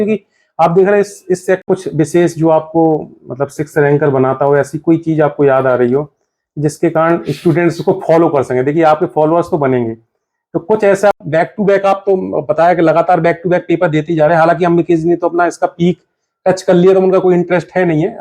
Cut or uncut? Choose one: cut